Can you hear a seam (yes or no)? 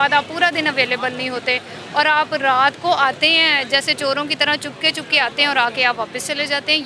no